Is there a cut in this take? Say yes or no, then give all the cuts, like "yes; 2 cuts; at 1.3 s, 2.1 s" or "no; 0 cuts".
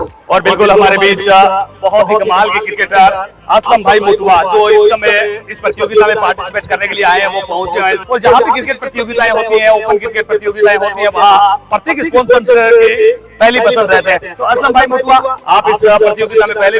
no; 0 cuts